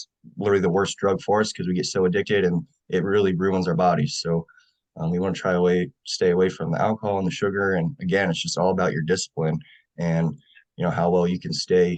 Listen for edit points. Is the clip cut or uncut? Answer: uncut